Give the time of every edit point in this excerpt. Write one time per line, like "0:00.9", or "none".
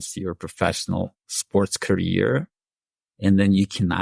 none